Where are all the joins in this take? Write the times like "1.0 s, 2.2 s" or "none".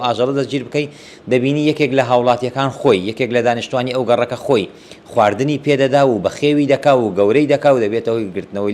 none